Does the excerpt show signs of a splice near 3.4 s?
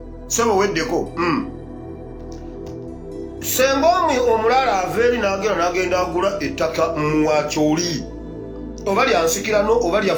no; 0 cuts

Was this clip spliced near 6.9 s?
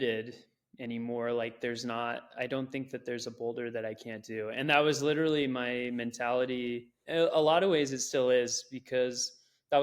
yes; 1 cut; at 6.9 s

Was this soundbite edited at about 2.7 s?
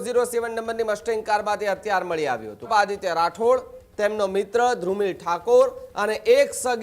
yes; 1 cut; at 2.7 s

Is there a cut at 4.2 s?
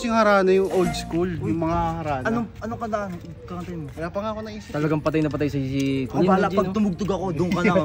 no; 0 cuts

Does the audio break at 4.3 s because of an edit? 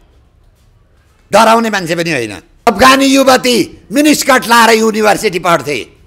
no; 1 cut; at 2.7 s

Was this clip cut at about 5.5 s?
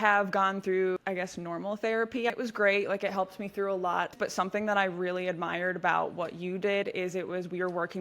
no; 3 cuts; at 1.0 s, 2.3 s, 4.1 s

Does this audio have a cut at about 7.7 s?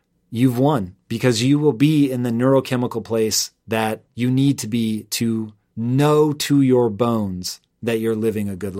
no; 2 cuts; at 4.1 s, 5.6 s

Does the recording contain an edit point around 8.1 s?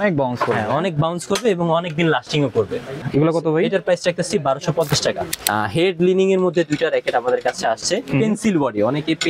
no; 2 cuts; at 3.0 s, 5.2 s

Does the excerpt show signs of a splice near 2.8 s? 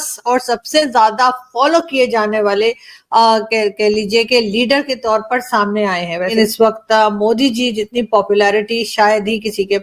no; 1 cut; at 6.3 s

